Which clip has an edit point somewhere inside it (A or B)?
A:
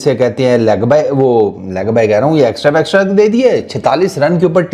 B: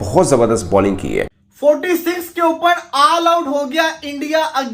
B